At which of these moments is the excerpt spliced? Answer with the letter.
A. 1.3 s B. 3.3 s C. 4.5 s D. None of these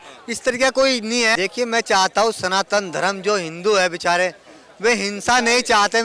A